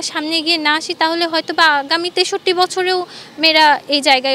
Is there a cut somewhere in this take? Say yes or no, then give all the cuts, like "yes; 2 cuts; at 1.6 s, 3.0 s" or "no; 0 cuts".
no; 0 cuts